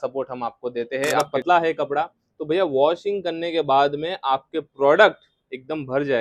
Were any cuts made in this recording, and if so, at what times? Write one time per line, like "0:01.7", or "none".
0:01.2